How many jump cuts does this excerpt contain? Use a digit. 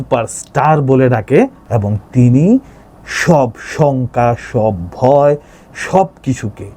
1